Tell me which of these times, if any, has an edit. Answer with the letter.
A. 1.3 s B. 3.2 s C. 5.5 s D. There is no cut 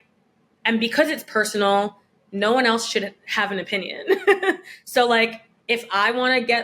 C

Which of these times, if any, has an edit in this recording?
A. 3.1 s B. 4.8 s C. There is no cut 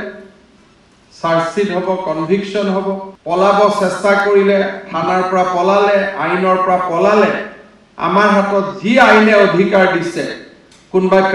A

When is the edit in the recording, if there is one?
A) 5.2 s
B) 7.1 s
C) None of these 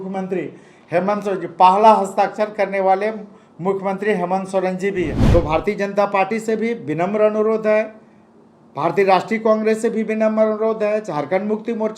A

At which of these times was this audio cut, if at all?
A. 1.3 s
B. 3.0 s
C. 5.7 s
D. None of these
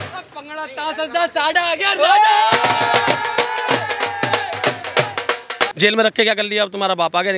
C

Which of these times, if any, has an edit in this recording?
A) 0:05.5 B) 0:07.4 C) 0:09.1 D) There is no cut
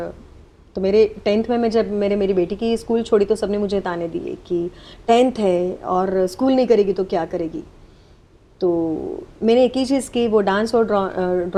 D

